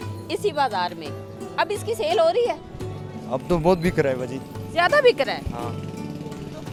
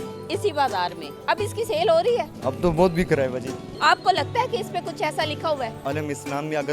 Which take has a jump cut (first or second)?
second